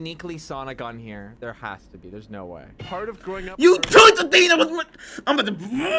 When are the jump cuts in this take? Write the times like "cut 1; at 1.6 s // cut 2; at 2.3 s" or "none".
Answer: cut 1; at 1.3 s